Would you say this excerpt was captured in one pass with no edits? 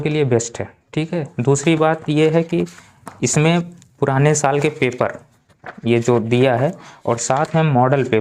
yes; 0 cuts

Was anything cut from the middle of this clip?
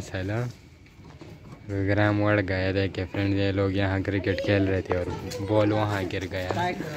no; 0 cuts

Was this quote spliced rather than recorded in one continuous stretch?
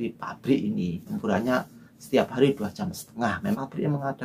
yes; 2 cuts; at 1.1 s, 3.6 s

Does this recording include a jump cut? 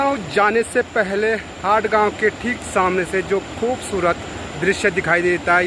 no; 0 cuts

